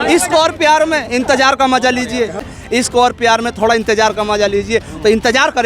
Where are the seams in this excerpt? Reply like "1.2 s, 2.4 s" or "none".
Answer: 2.4 s